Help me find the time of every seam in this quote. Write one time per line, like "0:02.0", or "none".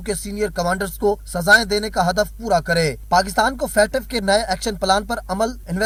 none